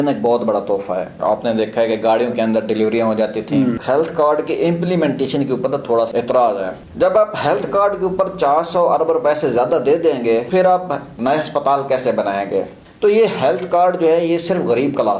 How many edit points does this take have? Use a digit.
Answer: 6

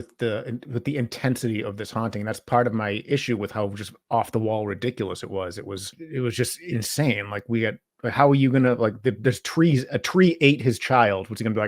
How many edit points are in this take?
1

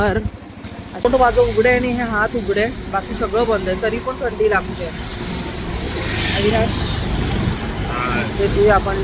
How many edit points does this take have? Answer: 1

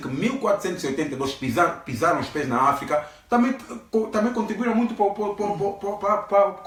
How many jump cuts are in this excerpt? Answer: 0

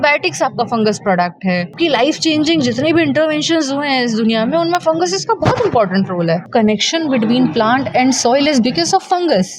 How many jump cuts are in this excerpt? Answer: 2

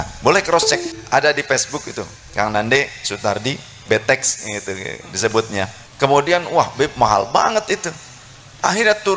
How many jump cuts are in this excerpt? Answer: 2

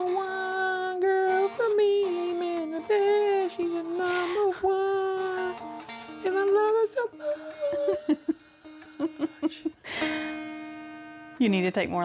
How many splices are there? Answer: 1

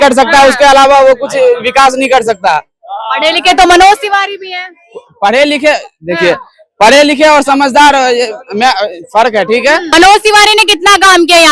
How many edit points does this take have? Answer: 1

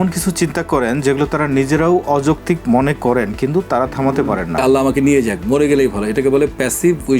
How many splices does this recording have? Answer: 1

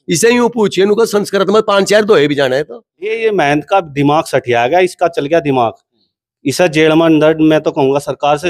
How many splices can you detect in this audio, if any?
1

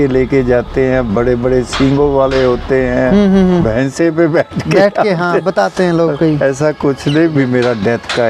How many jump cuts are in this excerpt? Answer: 1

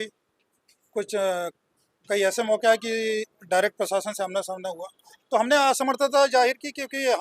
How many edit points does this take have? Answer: 0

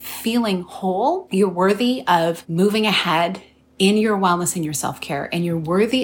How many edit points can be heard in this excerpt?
2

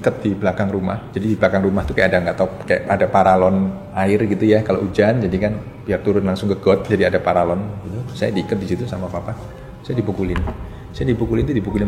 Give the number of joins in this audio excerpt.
3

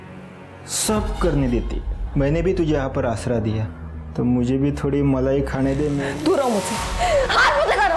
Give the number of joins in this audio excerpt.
1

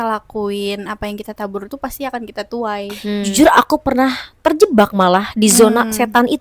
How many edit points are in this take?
1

